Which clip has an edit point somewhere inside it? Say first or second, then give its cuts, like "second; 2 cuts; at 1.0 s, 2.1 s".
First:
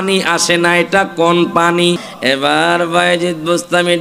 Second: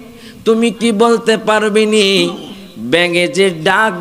first; 1 cut; at 2.1 s